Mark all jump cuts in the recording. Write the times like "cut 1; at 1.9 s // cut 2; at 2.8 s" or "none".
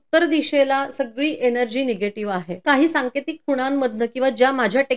cut 1; at 2.6 s